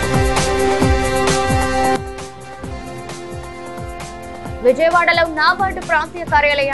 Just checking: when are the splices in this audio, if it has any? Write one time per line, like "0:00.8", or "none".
0:02.0